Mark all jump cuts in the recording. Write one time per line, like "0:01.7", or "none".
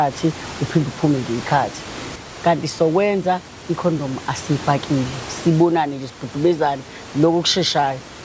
0:02.0